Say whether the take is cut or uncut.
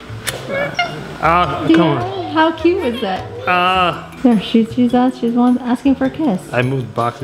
uncut